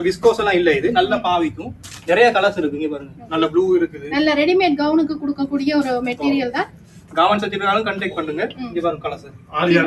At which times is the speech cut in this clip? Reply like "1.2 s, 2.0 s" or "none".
none